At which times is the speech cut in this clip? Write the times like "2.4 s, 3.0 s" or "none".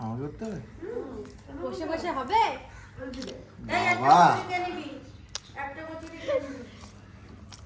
none